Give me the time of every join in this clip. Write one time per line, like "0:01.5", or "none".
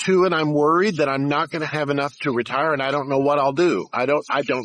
none